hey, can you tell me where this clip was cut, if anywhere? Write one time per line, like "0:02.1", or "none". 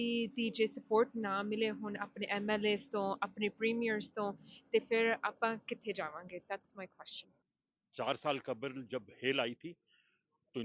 none